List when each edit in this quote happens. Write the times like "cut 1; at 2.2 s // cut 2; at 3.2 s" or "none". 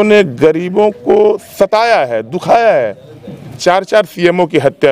cut 1; at 3.6 s